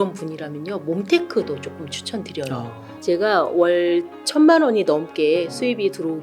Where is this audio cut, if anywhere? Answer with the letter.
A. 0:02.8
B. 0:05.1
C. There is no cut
A